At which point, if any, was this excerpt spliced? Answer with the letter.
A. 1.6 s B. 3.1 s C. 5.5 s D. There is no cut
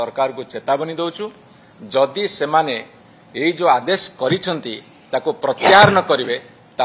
D